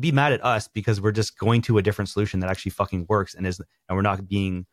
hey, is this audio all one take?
yes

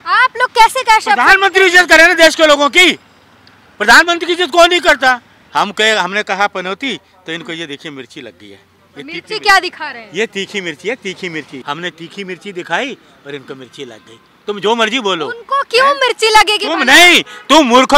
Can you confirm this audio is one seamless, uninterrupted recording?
no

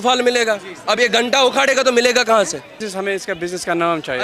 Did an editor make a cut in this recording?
yes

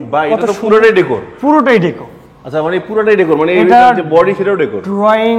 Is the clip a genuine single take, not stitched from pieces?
yes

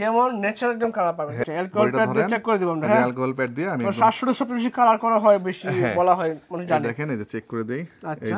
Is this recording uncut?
no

